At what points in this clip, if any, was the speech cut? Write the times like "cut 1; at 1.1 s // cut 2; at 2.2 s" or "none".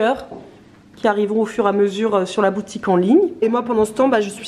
cut 1; at 3.4 s